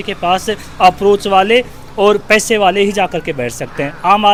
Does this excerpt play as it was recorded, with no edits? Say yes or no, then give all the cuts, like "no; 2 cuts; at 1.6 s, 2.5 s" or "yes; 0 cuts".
yes; 0 cuts